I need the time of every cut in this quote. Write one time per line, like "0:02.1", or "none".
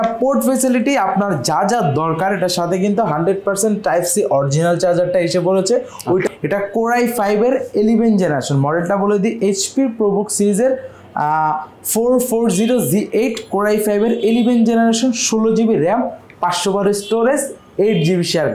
0:06.3